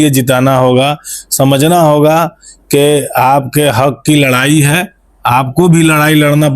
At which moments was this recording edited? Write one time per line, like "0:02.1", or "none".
none